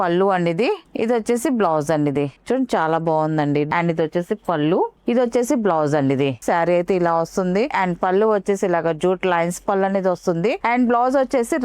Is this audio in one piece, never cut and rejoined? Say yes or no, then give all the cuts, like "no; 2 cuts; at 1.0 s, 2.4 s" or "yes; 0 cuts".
no; 5 cuts; at 2.4 s, 3.7 s, 6.4 s, 7.7 s, 10.6 s